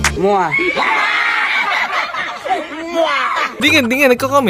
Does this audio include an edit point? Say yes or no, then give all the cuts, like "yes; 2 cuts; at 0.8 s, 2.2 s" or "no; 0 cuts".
no; 0 cuts